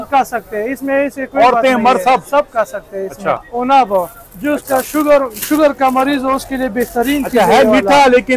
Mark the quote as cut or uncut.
cut